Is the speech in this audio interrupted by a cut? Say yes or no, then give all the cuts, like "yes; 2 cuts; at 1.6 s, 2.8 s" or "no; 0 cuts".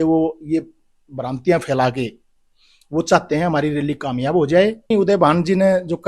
yes; 1 cut; at 4.9 s